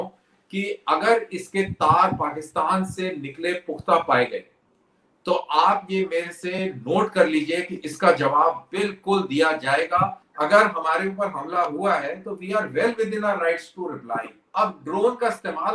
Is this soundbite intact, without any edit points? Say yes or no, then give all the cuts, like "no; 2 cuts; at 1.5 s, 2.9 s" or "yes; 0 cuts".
no; 2 cuts; at 10.2 s, 14.4 s